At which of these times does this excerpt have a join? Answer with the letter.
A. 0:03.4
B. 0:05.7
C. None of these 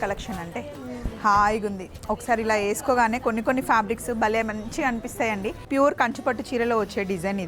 B